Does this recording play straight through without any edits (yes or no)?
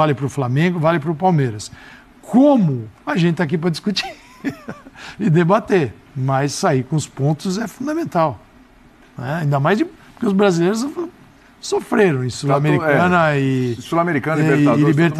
yes